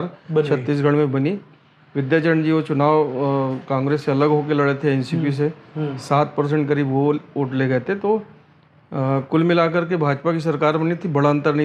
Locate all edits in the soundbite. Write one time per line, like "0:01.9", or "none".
none